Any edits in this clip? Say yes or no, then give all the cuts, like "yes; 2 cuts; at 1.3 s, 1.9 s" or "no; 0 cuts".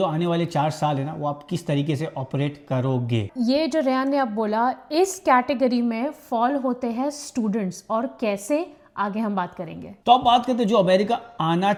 no; 0 cuts